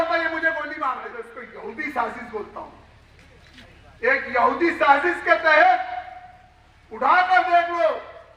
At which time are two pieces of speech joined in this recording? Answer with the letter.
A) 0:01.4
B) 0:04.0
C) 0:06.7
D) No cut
A